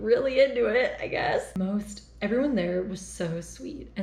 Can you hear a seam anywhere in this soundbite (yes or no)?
no